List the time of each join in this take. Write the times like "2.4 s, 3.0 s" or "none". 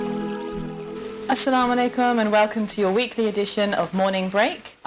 1.1 s